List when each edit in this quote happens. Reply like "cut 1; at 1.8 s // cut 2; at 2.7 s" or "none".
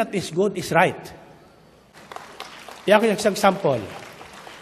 cut 1; at 2.0 s